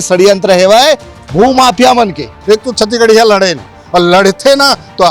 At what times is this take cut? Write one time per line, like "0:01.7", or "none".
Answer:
0:02.3